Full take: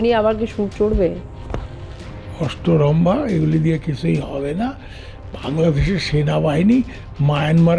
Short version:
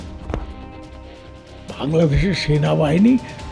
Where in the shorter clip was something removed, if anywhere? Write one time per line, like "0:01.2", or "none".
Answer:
0:01.1